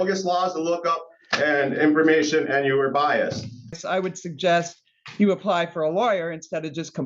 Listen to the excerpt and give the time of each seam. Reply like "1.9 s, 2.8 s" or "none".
3.8 s

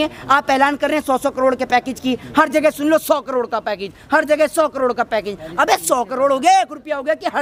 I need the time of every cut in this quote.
none

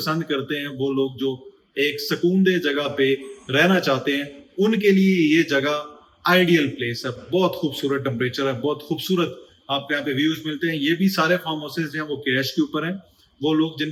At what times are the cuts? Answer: none

